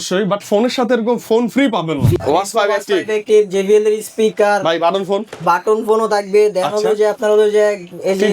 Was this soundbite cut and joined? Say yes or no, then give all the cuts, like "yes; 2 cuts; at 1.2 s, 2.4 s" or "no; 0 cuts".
yes; 1 cut; at 2.2 s